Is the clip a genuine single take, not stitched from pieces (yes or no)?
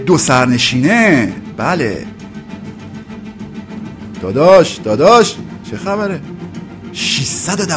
yes